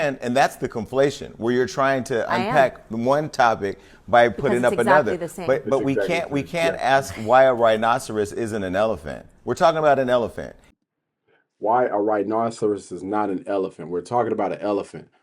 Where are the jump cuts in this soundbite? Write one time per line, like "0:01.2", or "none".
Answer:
none